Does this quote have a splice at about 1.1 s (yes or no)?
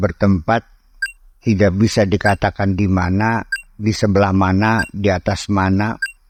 no